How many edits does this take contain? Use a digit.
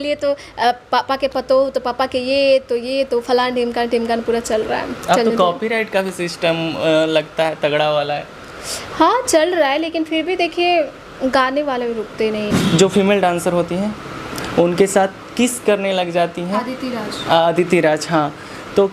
1